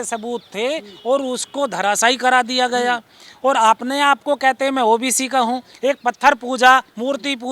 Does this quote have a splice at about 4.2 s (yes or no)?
no